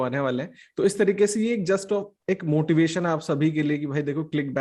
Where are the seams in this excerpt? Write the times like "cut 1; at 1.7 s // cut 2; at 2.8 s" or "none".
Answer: none

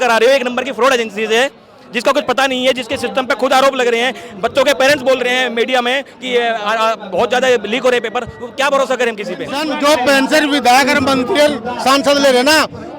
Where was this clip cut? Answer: cut 1; at 9.6 s

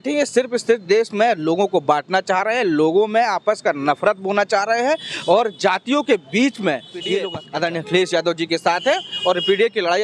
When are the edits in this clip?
cut 1; at 7.3 s

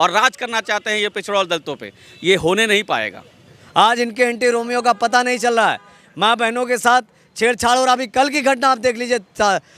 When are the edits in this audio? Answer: cut 1; at 3.5 s

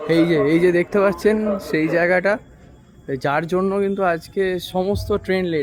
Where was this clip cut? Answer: none

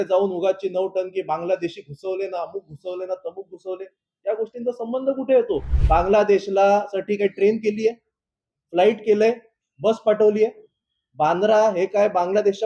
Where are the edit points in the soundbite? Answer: cut 1; at 5.7 s

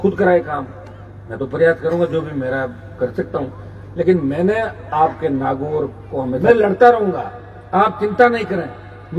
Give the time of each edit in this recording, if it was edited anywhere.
cut 1; at 6.4 s

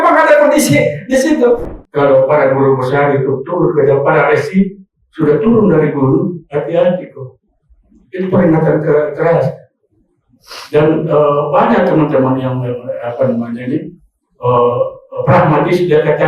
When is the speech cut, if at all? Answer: cut 1; at 1.7 s

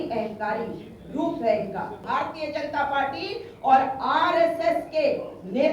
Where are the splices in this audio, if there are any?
cut 1; at 2.0 s

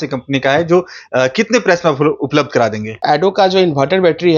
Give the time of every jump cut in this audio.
cut 1; at 2.9 s

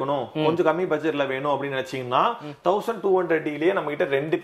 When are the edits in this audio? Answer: none

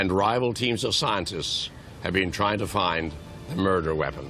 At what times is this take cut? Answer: cut 1; at 2.1 s

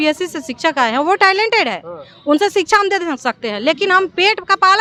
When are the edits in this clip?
none

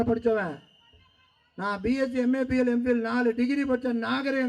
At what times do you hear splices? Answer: none

